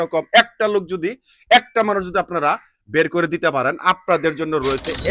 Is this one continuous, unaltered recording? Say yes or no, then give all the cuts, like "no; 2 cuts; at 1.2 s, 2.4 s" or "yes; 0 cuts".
yes; 0 cuts